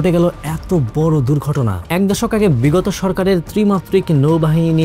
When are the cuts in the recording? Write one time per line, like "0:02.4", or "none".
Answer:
0:01.8